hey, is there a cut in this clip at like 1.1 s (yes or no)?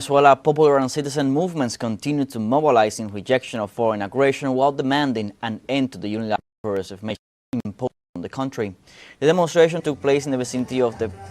yes